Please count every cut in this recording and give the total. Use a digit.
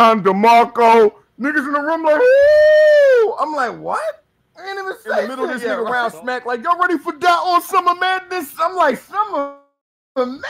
1